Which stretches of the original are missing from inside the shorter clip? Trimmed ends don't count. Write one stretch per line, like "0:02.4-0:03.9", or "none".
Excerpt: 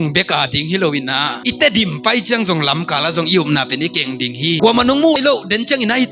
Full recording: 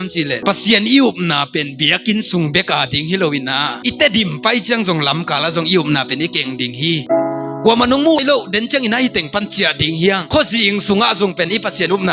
0:07.0-0:07.6

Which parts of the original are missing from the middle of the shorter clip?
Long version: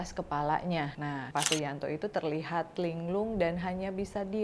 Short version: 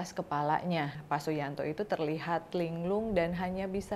0:01.0-0:01.2

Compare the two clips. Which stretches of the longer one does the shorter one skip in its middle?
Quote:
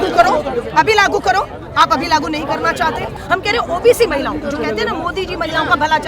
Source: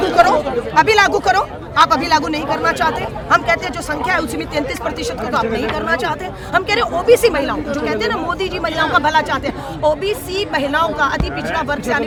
0:03.2-0:06.4

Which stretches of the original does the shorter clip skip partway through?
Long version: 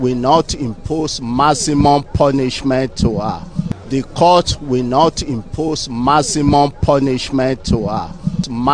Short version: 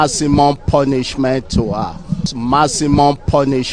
0:03.8-0:05.9

